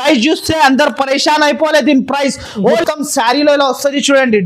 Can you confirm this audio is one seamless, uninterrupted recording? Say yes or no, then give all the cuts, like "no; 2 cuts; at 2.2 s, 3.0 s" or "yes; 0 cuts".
no; 1 cut; at 2.8 s